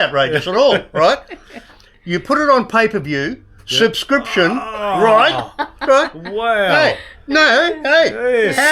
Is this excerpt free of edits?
yes; 0 cuts

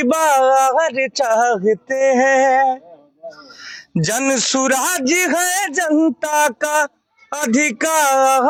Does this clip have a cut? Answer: no; 0 cuts

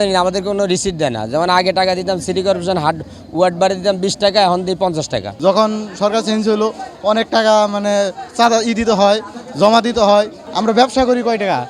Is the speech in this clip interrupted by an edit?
yes; 2 cuts; at 5.3 s, 10.4 s

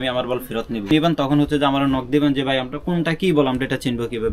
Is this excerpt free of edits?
no; 1 cut; at 0.9 s

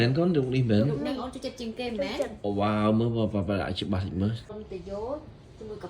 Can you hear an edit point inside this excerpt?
yes; 1 cut; at 4.4 s

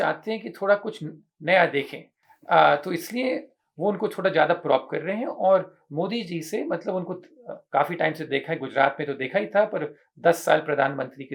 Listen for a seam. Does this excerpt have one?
no; 0 cuts

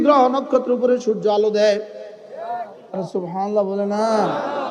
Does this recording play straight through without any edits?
yes; 0 cuts

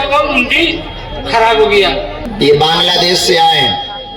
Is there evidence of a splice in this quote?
yes; 1 cut; at 2.2 s

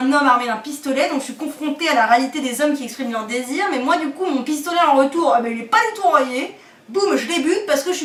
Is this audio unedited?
yes; 0 cuts

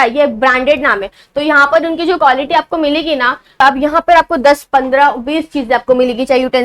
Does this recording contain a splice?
yes; 1 cut; at 3.6 s

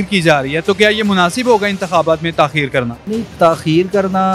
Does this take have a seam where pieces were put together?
yes; 1 cut; at 3.0 s

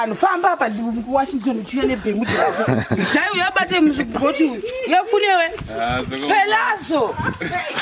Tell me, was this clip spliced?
no; 0 cuts

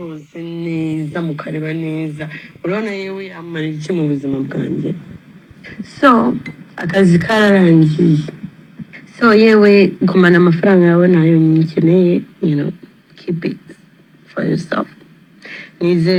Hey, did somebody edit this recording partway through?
no; 0 cuts

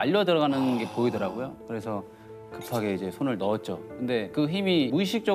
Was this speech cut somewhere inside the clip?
no; 0 cuts

